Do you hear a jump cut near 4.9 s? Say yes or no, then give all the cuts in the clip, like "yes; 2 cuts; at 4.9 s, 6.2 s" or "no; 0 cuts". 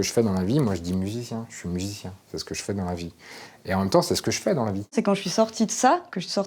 yes; 1 cut; at 4.9 s